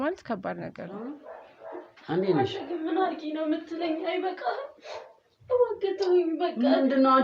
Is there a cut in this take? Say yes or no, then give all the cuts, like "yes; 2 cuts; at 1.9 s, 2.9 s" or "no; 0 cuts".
yes; 1 cut; at 1.0 s